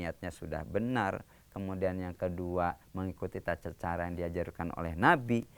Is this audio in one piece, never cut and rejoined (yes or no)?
yes